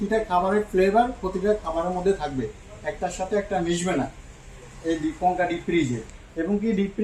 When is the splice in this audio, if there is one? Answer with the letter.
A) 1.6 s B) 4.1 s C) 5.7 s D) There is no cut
D